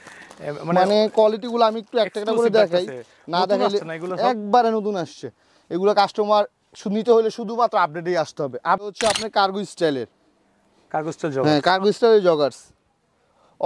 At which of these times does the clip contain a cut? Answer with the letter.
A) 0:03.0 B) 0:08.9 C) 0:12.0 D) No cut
B